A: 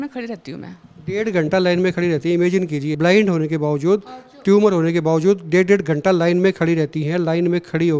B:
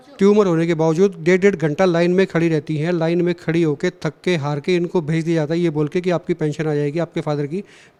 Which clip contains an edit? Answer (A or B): A